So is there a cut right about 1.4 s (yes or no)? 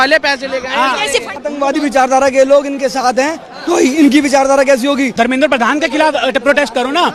yes